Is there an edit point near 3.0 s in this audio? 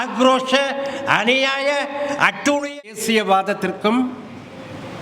yes; 1 cut; at 3.0 s

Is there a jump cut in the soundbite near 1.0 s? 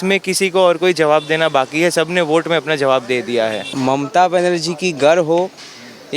no; 1 cut; at 3.7 s

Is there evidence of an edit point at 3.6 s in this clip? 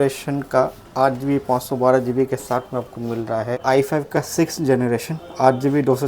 yes; 1 cut; at 3.6 s

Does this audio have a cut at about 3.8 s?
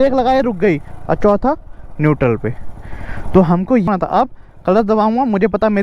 yes; 1 cut; at 3.8 s

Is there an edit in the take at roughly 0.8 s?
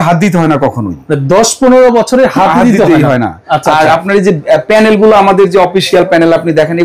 no; 0 cuts

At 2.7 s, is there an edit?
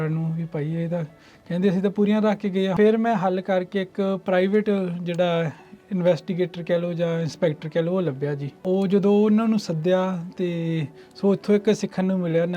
yes; 2 cuts; at 2.7 s, 8.5 s

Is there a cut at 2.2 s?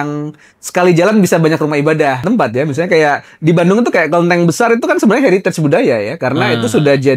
yes; 1 cut; at 2.2 s

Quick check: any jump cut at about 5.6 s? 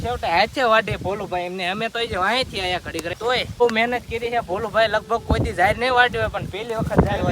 no; 1 cut; at 3.4 s

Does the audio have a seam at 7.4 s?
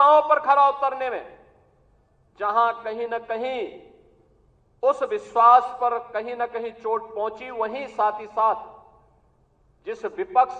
no; 0 cuts

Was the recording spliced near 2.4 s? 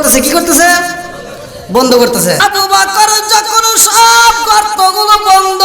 yes; 1 cut; at 2.4 s

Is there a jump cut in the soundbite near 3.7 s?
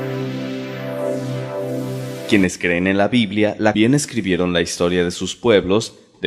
no; 0 cuts

